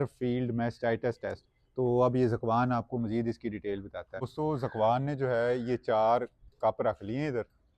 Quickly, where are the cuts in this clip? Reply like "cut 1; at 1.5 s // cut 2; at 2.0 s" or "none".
cut 1; at 4.2 s